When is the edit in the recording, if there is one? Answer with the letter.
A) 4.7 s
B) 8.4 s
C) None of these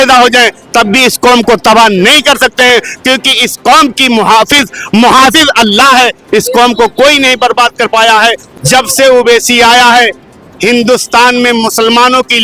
B